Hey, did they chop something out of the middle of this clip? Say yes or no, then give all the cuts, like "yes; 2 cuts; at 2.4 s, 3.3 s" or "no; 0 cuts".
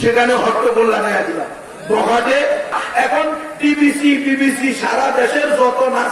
yes; 1 cut; at 2.8 s